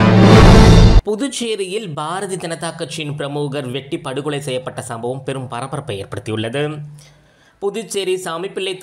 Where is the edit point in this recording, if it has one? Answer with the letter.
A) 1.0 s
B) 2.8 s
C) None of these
A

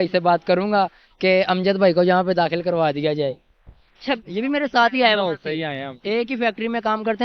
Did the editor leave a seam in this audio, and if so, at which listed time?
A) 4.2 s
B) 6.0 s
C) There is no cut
A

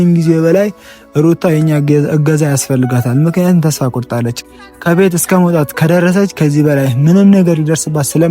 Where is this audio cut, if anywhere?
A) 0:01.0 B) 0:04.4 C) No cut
B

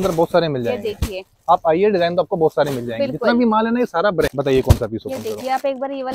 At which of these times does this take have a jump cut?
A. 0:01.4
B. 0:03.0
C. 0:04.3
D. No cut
C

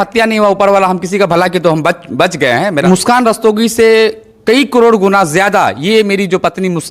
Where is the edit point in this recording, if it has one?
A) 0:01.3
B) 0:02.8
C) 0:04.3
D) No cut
B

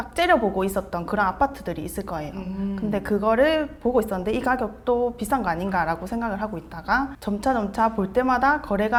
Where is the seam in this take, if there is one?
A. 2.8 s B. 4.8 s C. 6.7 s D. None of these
D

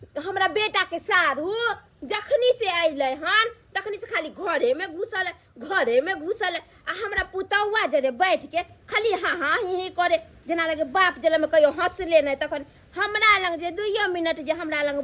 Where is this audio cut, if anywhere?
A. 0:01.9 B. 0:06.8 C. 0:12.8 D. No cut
D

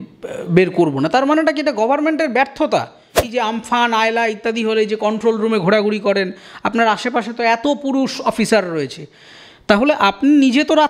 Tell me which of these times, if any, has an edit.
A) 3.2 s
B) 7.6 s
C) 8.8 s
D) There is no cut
A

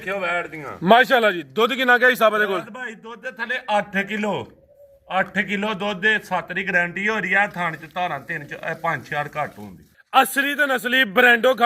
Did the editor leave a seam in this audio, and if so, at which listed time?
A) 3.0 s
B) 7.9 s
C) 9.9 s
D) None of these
C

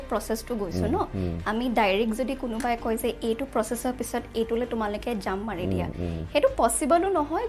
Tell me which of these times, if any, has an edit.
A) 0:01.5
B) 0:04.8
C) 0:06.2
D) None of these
D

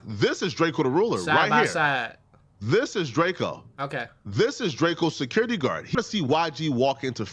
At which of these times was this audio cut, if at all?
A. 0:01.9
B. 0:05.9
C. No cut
B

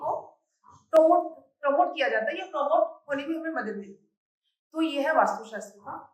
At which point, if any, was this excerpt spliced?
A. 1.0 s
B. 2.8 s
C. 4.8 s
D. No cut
D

